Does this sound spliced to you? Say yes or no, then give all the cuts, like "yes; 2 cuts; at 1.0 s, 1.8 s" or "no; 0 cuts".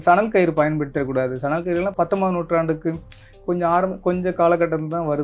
yes; 1 cut; at 1.9 s